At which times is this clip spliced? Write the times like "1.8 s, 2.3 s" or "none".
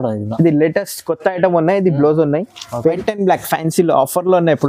3.0 s